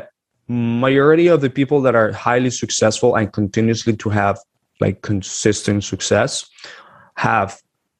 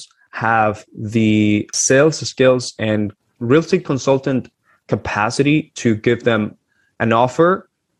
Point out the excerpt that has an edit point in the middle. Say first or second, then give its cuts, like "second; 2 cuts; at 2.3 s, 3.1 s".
second; 2 cuts; at 1.7 s, 3.2 s